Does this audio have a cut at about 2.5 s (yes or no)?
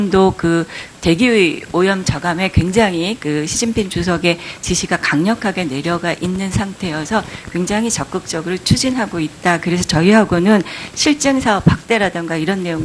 no